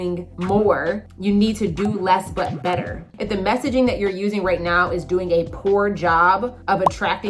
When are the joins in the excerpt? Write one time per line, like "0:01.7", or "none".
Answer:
0:03.0

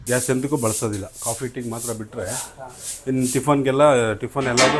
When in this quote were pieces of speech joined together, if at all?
none

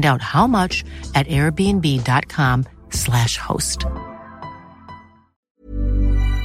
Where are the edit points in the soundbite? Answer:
0:05.4

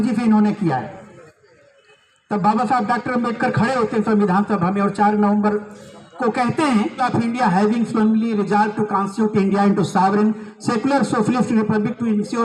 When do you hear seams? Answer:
0:07.0

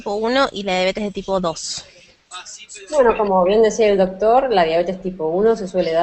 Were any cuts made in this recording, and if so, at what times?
none

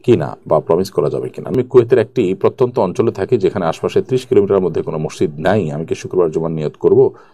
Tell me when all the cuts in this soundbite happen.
0:01.4

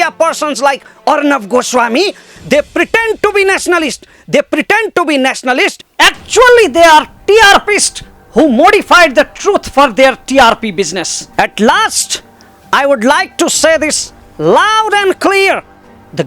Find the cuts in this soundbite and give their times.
0:11.2

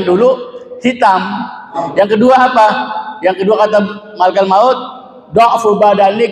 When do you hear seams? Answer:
0:01.8

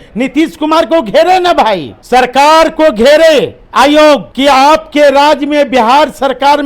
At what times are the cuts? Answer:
0:01.9
0:04.3

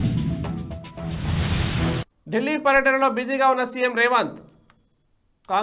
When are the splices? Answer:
0:02.1

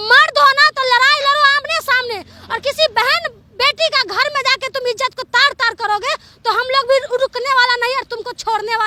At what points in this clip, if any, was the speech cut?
none

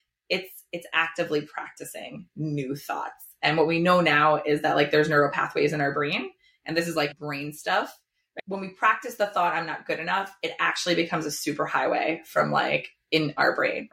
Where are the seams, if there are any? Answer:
0:07.1
0:08.4

